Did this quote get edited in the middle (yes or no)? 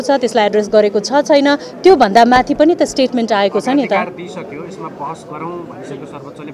no